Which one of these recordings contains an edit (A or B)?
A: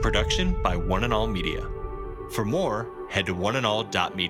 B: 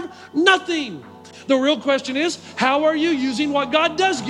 B